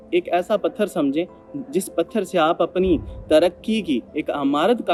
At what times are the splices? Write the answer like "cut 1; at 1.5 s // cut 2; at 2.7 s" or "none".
none

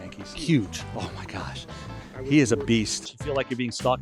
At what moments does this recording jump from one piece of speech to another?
cut 1; at 3.0 s

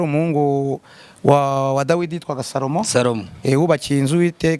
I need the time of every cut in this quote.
none

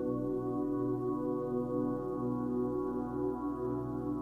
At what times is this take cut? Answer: none

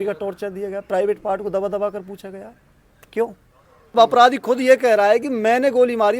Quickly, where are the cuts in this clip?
cut 1; at 4.0 s

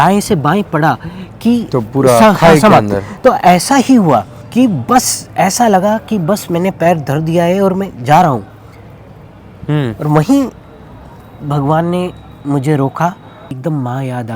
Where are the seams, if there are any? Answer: cut 1; at 4.4 s // cut 2; at 13.5 s

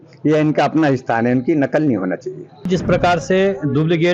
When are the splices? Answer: cut 1; at 2.6 s

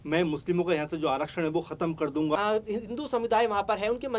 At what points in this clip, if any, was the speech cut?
cut 1; at 2.4 s

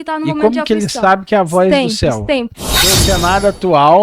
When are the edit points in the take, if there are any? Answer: cut 1; at 2.6 s

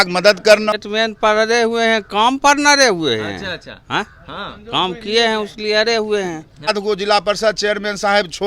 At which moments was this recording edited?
cut 1; at 0.8 s // cut 2; at 6.7 s

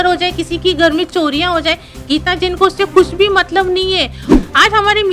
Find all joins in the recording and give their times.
cut 1; at 4.2 s

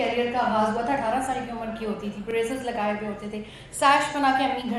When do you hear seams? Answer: none

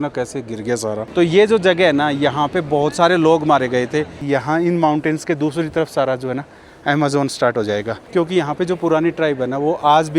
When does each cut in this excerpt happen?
cut 1; at 1.0 s // cut 2; at 4.2 s // cut 3; at 8.0 s

